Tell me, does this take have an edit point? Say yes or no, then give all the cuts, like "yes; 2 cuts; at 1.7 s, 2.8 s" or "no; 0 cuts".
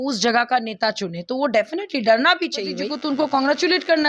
yes; 1 cut; at 2.9 s